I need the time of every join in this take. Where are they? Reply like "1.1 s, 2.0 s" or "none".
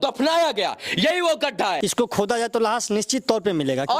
1.8 s